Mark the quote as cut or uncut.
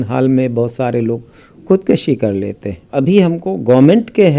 cut